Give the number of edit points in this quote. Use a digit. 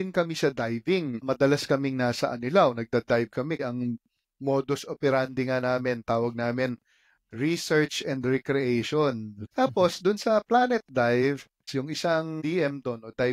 4